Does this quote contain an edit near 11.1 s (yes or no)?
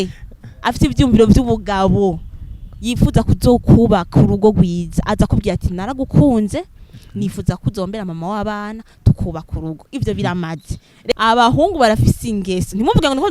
yes